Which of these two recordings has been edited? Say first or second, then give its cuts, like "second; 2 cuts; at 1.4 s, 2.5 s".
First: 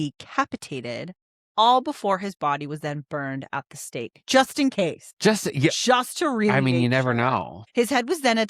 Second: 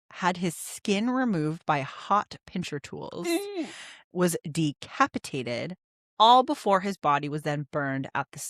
first; 2 cuts; at 5.0 s, 7.6 s